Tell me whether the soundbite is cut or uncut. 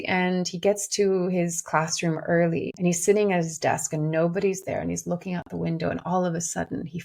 cut